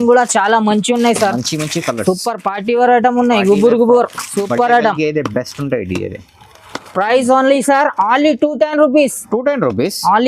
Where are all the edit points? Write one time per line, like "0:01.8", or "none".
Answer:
none